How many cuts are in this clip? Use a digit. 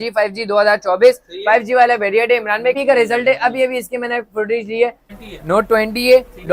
2